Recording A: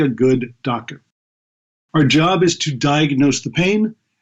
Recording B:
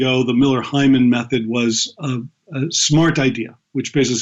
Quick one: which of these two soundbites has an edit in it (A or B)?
A